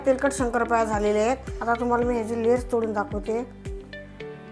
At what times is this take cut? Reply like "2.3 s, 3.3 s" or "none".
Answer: 1.5 s, 3.5 s